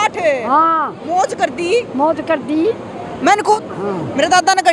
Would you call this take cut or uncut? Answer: cut